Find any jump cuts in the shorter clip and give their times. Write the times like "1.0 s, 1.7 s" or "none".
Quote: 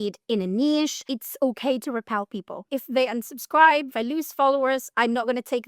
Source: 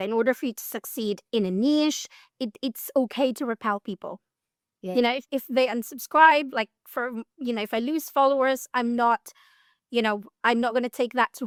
1.1 s, 2.6 s, 3.9 s, 4.9 s